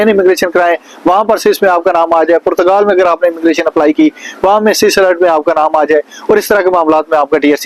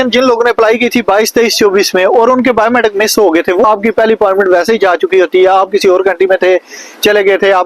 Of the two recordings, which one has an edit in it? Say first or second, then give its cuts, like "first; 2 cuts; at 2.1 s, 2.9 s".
second; 1 cut; at 3.6 s